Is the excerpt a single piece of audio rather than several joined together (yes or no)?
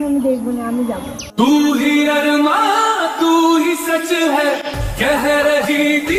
yes